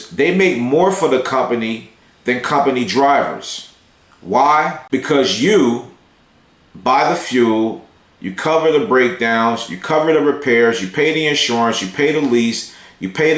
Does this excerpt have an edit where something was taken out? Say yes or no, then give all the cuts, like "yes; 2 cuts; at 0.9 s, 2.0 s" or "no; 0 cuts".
yes; 1 cut; at 4.8 s